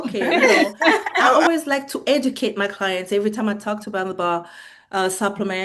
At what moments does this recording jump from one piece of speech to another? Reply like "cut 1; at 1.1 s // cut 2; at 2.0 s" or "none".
cut 1; at 1.4 s